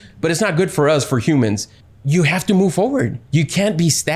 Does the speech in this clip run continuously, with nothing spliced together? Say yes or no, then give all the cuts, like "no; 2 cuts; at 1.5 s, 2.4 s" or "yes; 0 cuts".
no; 2 cuts; at 1.8 s, 3.2 s